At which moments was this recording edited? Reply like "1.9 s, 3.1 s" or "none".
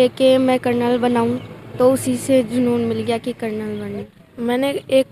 4.1 s